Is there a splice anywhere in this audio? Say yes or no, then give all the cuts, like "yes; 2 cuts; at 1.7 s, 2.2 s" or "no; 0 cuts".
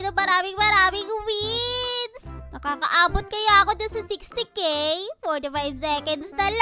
no; 0 cuts